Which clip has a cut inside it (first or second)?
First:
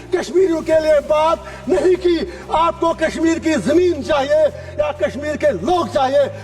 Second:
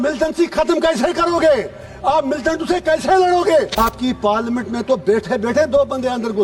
second